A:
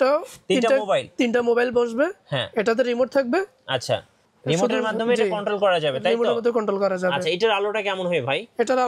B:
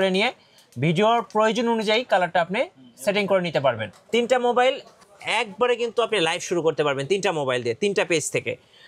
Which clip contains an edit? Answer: B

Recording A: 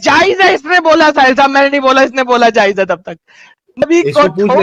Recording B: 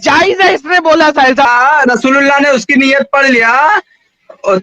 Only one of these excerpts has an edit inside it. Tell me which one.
B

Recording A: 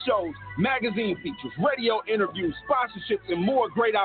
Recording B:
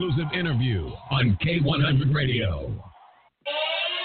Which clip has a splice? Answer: B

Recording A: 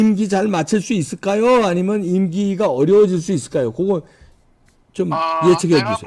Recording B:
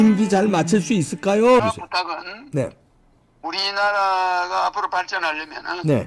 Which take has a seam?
B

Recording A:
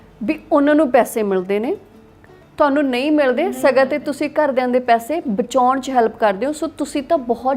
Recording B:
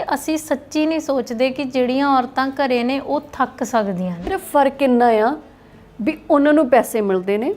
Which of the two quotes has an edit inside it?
B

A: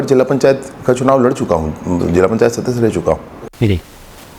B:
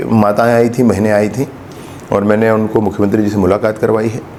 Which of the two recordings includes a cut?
A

